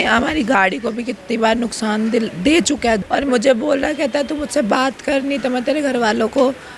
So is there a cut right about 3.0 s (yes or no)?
yes